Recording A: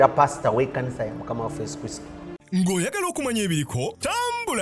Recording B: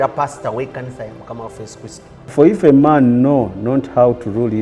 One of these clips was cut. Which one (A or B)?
B